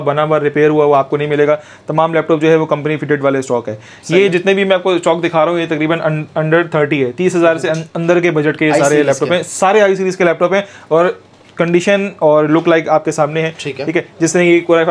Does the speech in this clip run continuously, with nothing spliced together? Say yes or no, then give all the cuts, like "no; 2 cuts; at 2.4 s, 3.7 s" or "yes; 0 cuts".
yes; 0 cuts